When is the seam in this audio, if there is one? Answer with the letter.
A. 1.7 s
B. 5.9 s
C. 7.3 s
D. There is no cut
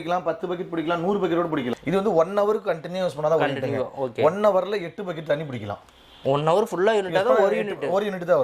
A